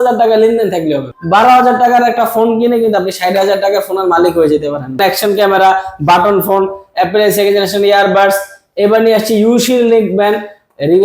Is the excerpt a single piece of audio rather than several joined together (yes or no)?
no